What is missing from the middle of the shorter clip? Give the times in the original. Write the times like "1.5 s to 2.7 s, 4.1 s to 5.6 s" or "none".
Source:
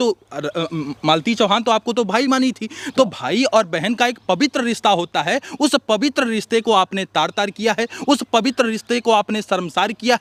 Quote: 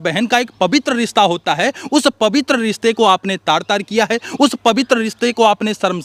none